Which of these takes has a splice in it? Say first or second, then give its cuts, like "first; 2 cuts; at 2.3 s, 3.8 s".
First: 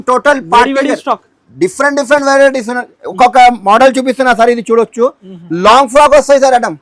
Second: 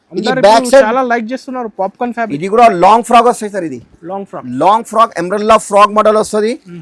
second; 1 cut; at 2.3 s